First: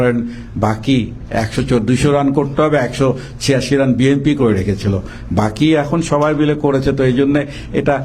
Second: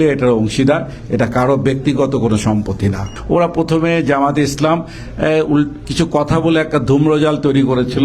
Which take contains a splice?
second; 1 cut; at 3.1 s

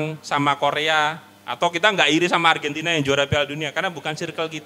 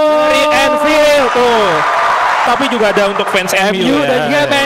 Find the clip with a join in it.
second; 1 cut; at 2.5 s

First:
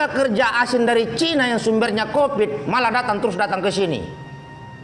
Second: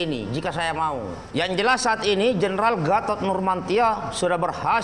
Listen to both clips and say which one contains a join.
second; 1 cut; at 1.2 s

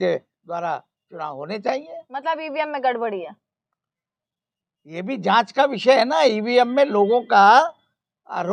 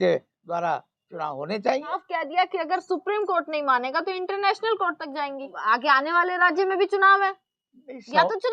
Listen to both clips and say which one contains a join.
second; 2 cuts; at 1.9 s, 5.6 s

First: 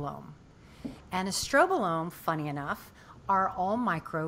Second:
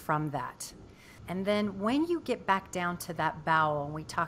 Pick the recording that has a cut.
second; 1 cut; at 1.1 s

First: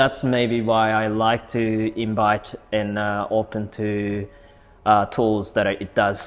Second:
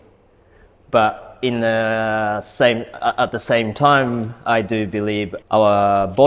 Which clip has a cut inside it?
second; 1 cut; at 5.3 s

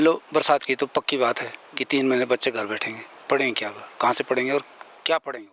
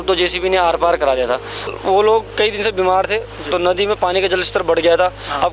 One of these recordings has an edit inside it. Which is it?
second; 1 cut; at 1.7 s

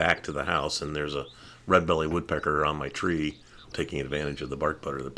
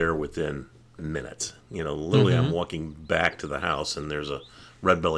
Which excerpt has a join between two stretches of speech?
first; 1 cut; at 3.7 s

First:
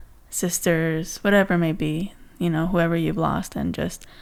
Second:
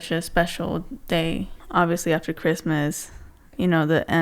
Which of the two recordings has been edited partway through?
second; 1 cut; at 1.6 s

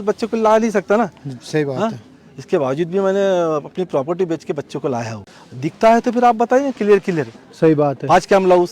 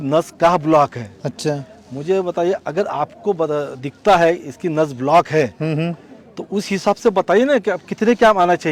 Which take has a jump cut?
first; 1 cut; at 5.2 s

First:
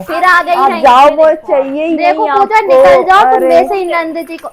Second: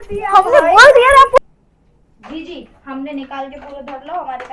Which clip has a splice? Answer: second; 1 cut; at 1.4 s

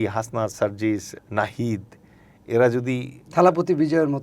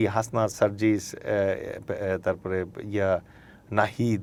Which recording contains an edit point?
first; 1 cut; at 1.1 s

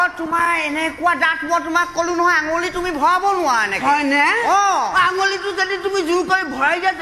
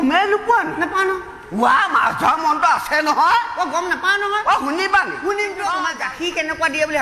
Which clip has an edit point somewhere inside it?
second; 1 cut; at 6.0 s

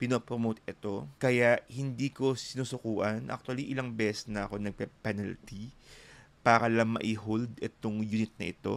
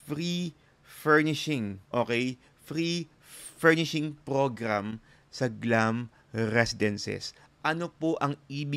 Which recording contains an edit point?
first; 1 cut; at 1.1 s

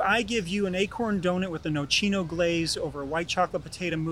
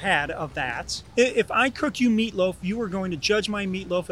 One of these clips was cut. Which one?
second; 1 cut; at 1.0 s

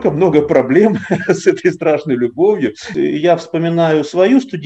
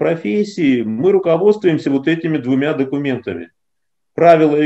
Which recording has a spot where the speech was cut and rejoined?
first; 1 cut; at 2.9 s

